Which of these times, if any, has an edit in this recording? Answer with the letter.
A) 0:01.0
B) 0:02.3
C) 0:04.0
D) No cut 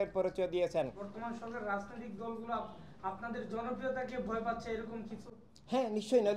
A